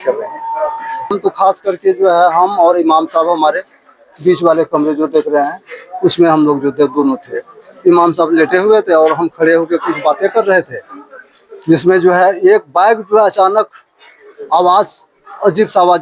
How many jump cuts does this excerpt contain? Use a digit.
1